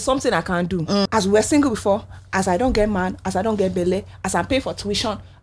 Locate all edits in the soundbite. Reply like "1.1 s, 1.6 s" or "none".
1.1 s